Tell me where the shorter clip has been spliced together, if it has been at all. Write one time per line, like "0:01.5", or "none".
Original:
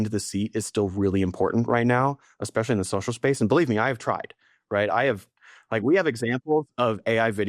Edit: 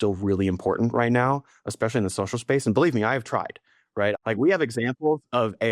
0:04.2